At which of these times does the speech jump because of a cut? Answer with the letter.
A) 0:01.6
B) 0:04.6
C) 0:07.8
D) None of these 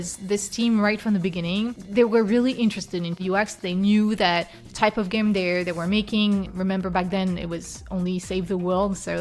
A